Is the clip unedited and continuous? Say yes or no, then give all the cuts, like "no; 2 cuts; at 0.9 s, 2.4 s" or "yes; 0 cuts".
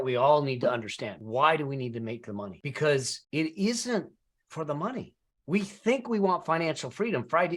no; 3 cuts; at 1.1 s, 2.6 s, 3.2 s